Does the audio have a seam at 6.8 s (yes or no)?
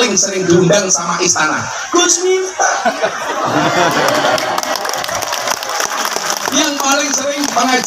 no